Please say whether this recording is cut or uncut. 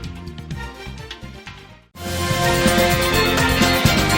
cut